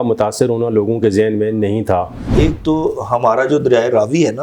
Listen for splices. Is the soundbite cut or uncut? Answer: cut